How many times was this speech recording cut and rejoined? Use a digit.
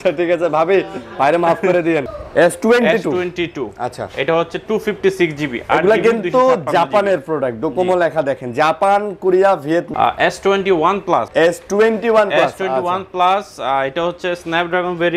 3